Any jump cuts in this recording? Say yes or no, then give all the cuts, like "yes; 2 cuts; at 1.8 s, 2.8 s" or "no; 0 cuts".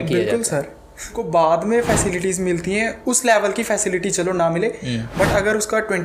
yes; 1 cut; at 1.2 s